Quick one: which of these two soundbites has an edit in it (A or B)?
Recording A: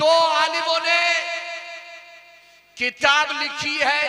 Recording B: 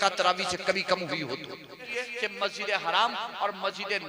B